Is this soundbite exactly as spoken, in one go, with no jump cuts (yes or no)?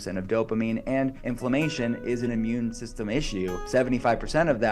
no